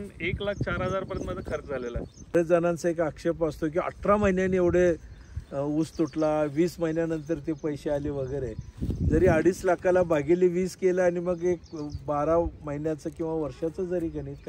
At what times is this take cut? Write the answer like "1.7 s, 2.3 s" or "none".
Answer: 2.3 s